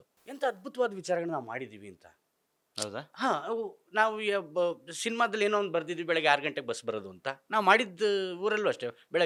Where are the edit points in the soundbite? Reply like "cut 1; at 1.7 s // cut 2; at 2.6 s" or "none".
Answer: none